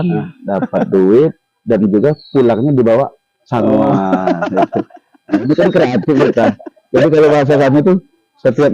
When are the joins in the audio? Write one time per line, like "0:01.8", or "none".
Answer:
none